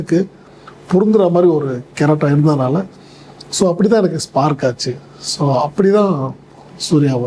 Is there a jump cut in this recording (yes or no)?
no